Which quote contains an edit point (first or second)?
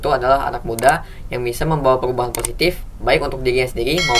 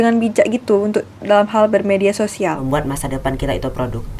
second